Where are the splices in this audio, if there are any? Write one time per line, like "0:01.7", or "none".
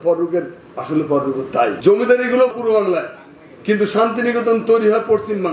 0:01.8
0:02.5